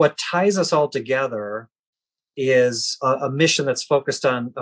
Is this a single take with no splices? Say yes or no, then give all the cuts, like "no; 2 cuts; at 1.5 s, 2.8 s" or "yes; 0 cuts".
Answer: no; 1 cut; at 2.9 s